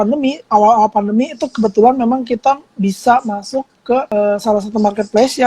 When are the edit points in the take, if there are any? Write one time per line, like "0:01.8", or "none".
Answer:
0:04.1